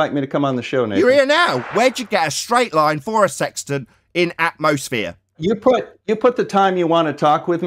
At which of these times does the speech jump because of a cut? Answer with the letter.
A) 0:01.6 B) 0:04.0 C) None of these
A